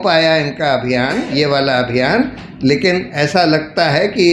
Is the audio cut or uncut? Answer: uncut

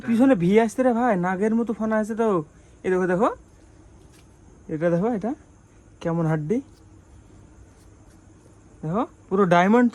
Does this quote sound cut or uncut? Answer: uncut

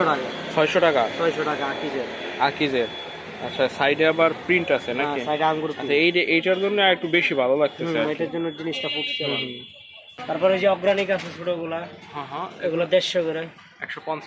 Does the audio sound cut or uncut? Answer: cut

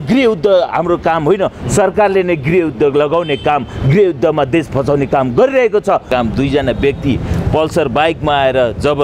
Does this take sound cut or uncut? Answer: cut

